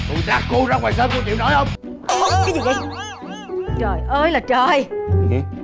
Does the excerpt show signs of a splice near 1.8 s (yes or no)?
yes